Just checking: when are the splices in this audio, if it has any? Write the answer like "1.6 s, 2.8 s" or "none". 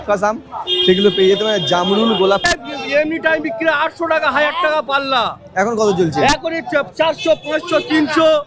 2.4 s